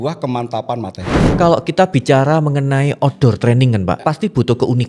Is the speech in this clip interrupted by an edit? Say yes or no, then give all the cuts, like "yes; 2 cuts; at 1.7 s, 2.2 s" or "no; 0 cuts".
yes; 2 cuts; at 1.4 s, 4.0 s